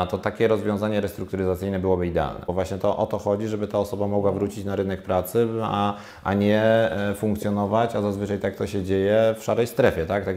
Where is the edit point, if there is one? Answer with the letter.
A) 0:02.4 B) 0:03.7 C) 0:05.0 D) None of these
A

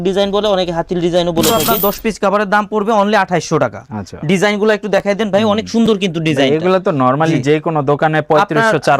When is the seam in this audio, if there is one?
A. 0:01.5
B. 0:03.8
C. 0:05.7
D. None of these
A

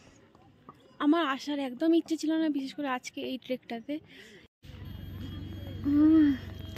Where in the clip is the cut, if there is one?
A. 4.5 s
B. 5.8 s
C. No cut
A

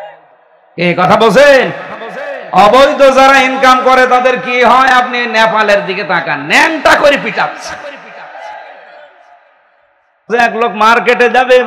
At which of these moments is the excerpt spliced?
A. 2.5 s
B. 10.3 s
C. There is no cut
B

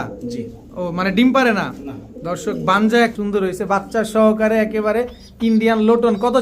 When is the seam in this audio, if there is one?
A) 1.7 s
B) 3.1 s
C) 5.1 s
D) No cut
B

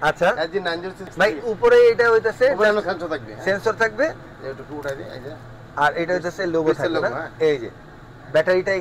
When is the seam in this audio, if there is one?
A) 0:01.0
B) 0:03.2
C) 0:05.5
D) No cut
A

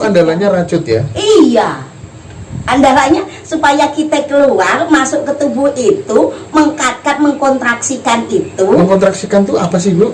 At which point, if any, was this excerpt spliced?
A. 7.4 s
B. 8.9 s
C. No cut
C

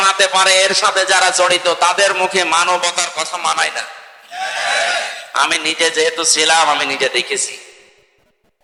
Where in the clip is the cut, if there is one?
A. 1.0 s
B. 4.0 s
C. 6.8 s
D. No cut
D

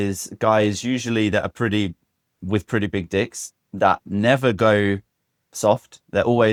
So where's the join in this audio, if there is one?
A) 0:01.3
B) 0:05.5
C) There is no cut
C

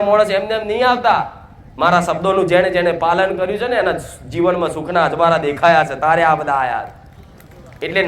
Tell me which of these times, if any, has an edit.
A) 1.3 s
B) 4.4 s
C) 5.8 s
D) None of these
D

